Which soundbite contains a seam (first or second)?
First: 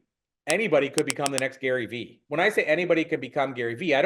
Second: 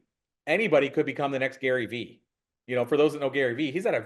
first